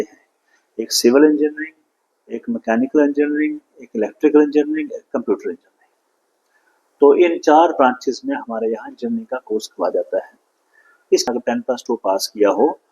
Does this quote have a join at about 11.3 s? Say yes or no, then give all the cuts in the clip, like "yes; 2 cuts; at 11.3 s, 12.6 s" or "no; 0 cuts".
yes; 1 cut; at 11.3 s